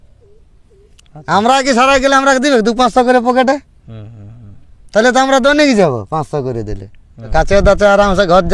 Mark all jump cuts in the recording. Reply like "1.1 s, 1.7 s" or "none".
7.2 s